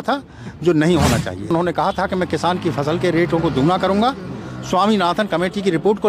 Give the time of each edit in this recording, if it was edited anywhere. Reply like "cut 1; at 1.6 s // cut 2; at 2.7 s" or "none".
cut 1; at 1.5 s